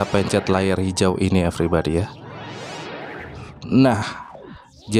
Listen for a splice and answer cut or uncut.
uncut